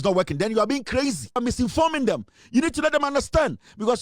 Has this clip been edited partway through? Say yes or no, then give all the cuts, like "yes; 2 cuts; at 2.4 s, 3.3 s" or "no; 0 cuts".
yes; 1 cut; at 1.4 s